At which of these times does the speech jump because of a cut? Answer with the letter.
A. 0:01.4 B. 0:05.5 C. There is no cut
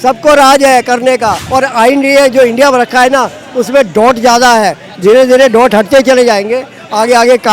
A